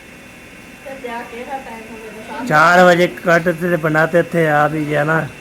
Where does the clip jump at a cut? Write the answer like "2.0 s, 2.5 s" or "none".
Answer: none

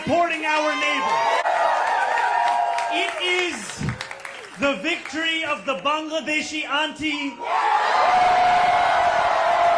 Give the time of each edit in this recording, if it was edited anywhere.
1.4 s

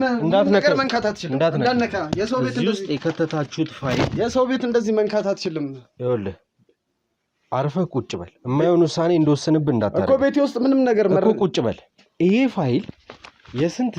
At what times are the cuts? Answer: none

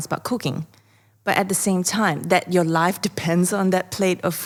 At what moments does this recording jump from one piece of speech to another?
none

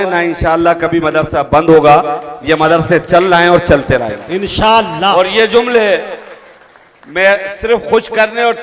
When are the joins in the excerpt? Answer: none

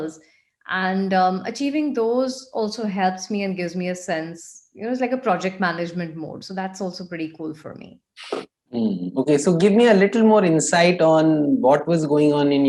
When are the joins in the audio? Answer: none

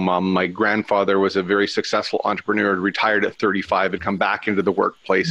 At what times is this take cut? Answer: none

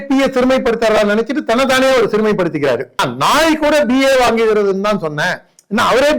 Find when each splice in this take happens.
3.0 s

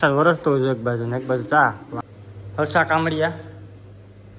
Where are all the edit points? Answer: 1.9 s

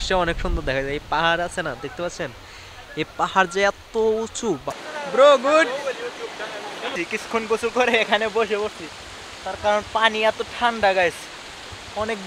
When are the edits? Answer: 4.8 s, 7.0 s

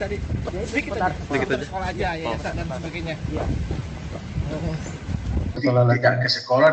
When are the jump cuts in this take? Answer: 5.5 s

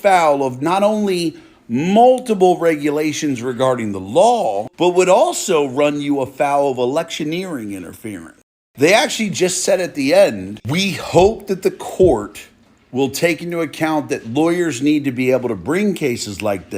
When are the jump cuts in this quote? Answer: 8.6 s

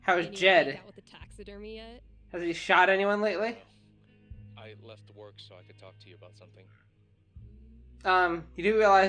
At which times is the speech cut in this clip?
none

